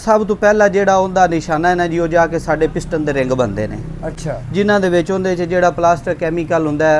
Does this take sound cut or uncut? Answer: uncut